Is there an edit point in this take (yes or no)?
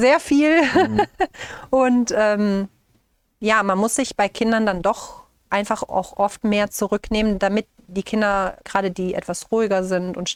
no